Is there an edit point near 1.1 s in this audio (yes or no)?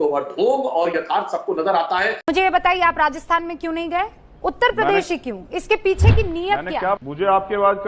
no